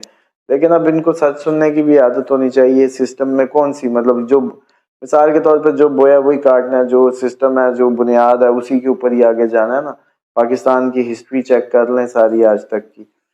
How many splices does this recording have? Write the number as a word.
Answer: zero